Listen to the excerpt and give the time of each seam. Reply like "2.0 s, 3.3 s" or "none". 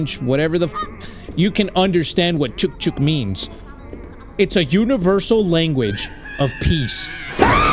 none